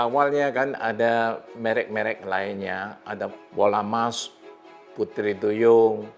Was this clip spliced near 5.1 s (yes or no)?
no